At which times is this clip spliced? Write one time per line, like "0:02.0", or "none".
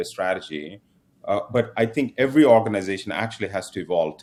none